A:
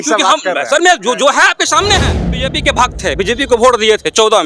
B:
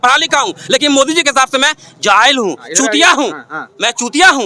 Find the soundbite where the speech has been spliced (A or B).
A